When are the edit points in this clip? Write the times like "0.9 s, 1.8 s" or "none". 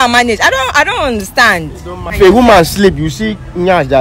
2.1 s